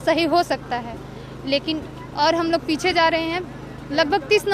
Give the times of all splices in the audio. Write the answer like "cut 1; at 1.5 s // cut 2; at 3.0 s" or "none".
none